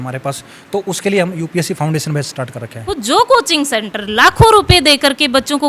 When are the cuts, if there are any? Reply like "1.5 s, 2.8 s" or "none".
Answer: 2.9 s